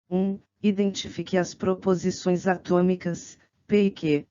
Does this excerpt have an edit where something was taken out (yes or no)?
yes